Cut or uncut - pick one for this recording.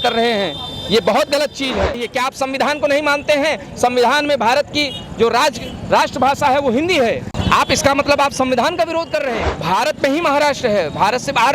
cut